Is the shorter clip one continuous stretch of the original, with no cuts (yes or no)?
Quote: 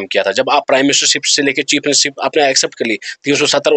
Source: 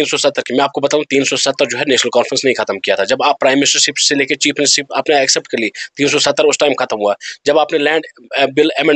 yes